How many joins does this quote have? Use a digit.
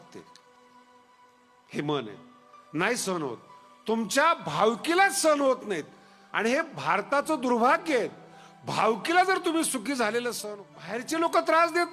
1